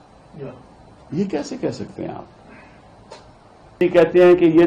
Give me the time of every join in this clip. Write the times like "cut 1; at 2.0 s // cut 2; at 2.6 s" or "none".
cut 1; at 3.8 s